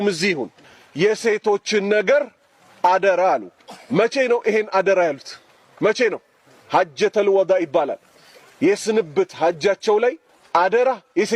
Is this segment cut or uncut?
uncut